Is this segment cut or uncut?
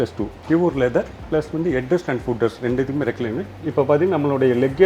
cut